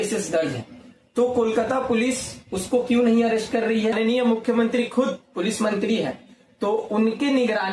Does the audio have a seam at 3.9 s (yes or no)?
yes